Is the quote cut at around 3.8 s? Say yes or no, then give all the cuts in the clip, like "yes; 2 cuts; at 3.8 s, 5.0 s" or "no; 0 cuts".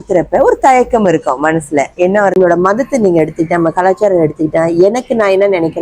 no; 1 cut; at 2.3 s